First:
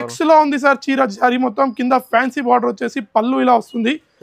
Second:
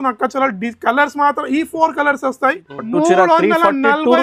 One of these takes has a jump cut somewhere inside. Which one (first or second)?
second